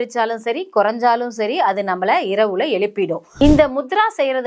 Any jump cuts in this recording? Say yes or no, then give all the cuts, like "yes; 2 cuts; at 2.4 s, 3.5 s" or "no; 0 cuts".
yes; 1 cut; at 3.2 s